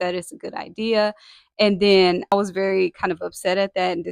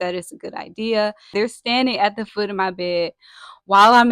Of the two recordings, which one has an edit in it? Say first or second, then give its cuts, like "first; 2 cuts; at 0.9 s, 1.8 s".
second; 1 cut; at 1.3 s